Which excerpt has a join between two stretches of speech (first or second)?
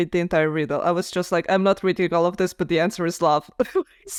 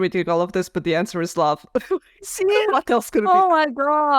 second